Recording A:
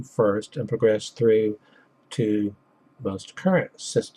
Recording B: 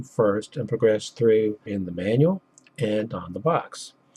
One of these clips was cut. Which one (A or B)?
A